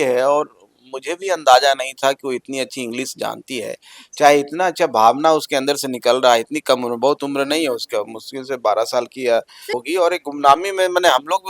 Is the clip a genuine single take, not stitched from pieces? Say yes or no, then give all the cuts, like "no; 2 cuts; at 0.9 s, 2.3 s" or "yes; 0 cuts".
no; 1 cut; at 9.6 s